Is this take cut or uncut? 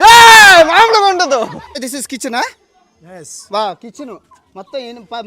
cut